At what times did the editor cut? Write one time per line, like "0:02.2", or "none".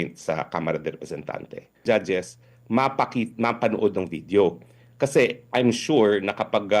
0:01.8